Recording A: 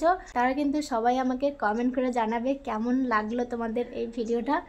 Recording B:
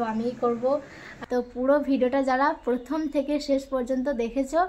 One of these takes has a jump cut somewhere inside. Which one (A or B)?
B